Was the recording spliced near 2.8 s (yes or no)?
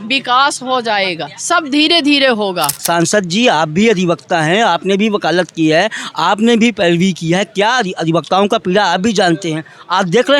yes